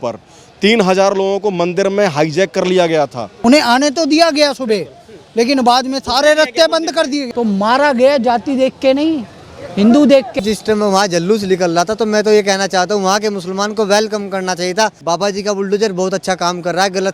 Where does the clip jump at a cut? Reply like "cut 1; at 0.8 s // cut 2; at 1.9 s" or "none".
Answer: cut 1; at 3.3 s // cut 2; at 7.3 s // cut 3; at 10.4 s // cut 4; at 15.0 s